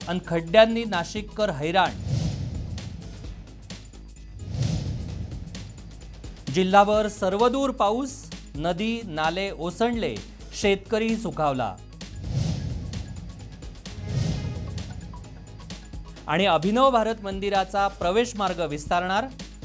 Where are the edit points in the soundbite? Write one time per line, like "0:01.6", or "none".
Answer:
none